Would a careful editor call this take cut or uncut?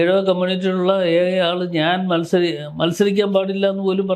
uncut